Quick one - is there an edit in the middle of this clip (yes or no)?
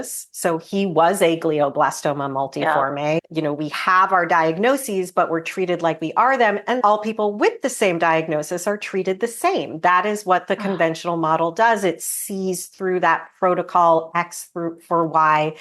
yes